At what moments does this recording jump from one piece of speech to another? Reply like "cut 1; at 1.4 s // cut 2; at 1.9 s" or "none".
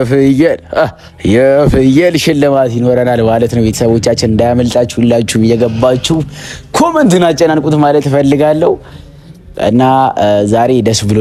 none